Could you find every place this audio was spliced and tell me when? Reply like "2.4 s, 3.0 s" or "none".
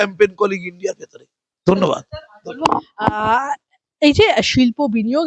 none